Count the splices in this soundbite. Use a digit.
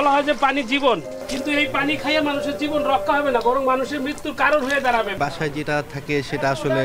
2